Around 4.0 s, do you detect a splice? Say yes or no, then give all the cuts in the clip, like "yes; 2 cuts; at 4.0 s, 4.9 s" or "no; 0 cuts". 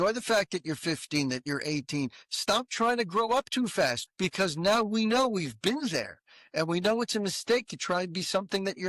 yes; 1 cut; at 4.0 s